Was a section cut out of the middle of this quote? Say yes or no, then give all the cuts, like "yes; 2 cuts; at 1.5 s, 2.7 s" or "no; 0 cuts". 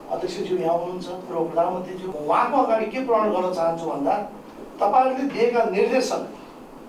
yes; 1 cut; at 2.1 s